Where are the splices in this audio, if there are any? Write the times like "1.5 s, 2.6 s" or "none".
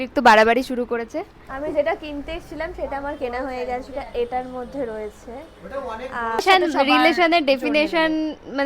1.4 s, 6.4 s